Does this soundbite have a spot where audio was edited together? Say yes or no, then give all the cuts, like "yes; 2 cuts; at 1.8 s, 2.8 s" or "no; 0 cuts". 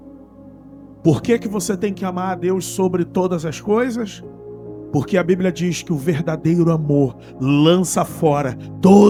no; 0 cuts